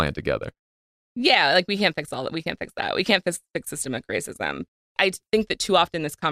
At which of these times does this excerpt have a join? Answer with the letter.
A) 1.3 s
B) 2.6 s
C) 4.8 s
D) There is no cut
C